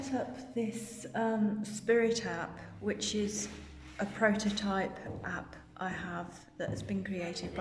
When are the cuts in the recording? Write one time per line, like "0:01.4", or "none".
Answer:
none